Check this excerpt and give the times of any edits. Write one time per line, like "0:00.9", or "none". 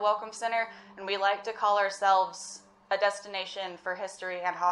none